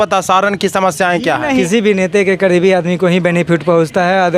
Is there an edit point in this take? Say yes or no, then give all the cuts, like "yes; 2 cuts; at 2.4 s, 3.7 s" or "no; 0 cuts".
yes; 1 cut; at 1.6 s